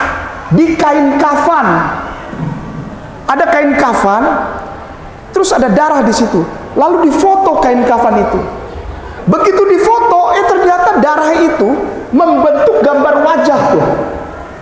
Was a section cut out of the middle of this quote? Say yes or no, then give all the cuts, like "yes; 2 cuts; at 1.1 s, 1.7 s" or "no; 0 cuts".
yes; 1 cut; at 9.1 s